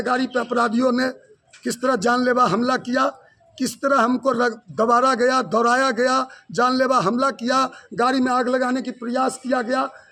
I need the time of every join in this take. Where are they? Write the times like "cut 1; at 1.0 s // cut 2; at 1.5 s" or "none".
none